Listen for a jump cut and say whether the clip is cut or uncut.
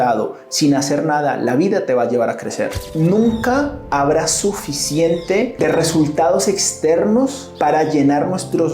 cut